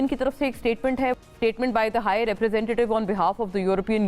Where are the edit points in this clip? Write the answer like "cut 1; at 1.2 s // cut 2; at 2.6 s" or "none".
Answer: cut 1; at 1.2 s